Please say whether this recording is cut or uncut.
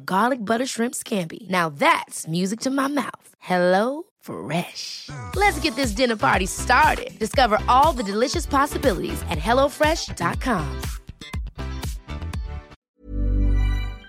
cut